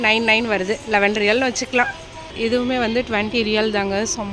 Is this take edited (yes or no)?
yes